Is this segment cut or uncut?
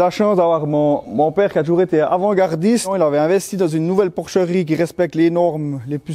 uncut